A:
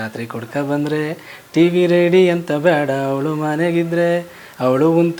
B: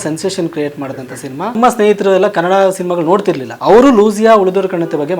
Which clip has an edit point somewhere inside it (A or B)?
B